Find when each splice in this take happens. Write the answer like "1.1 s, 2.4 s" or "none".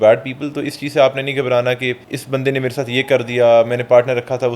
2.1 s